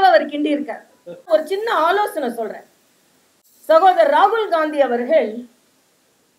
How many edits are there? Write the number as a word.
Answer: one